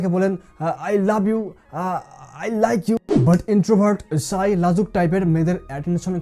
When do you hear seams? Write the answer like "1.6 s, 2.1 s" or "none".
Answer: 3.0 s